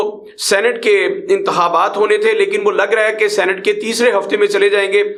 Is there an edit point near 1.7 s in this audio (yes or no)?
no